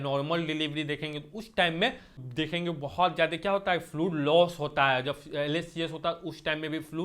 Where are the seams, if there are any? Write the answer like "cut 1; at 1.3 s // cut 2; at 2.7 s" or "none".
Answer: cut 1; at 2.2 s